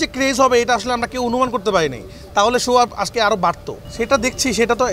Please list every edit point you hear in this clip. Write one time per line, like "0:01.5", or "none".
none